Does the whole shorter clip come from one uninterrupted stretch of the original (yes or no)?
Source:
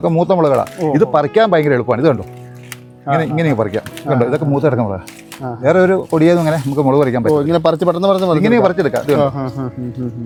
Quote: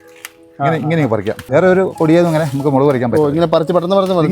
no